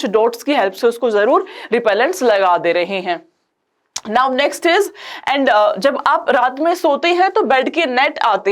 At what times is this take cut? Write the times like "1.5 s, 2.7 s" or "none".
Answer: none